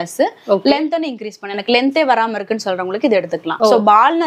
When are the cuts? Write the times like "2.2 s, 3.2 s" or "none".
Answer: none